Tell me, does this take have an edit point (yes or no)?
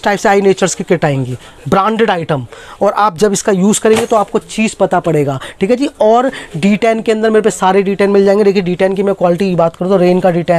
no